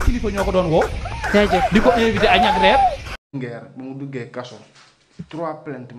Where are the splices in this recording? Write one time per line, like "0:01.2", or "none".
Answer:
0:03.1